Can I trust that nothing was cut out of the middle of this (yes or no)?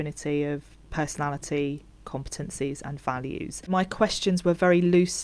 no